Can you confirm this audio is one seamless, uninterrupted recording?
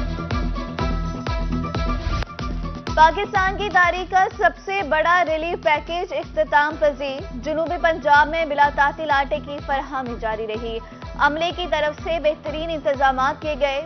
no; 1 cut; at 2.2 s

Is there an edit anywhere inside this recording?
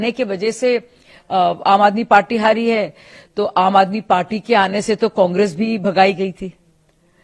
no; 0 cuts

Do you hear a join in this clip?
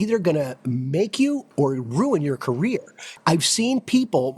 yes; 2 cuts; at 1.5 s, 3.1 s

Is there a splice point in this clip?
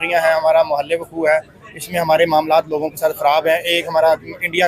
no; 0 cuts

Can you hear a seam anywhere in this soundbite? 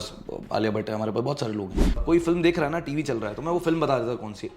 yes; 1 cut; at 2.0 s

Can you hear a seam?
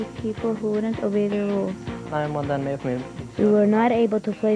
yes; 1 cut; at 2.1 s

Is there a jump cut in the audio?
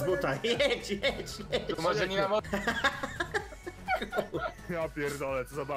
yes; 1 cut; at 2.4 s

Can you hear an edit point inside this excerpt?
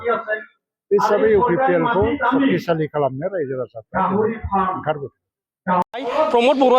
yes; 1 cut; at 5.8 s

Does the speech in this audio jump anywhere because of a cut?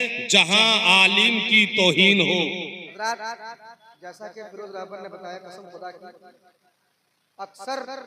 yes; 1 cut; at 2.8 s

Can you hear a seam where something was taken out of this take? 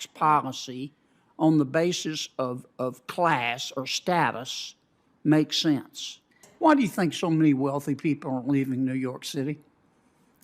yes; 1 cut; at 6.4 s

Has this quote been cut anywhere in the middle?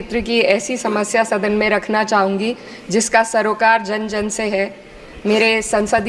no; 0 cuts

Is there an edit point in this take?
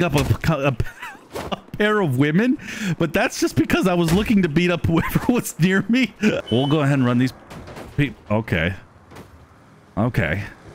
yes; 1 cut; at 6.4 s

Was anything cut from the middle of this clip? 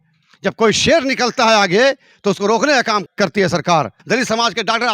yes; 2 cuts; at 3.1 s, 4.0 s

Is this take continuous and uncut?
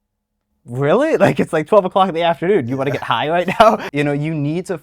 no; 1 cut; at 3.8 s

